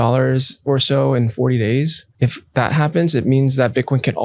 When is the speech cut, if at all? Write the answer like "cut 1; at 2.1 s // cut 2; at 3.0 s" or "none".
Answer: cut 1; at 2.0 s